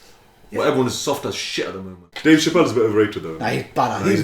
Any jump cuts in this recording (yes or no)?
yes